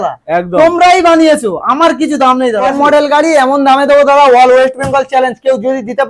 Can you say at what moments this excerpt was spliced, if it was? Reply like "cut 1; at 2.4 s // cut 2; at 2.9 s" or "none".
cut 1; at 2.6 s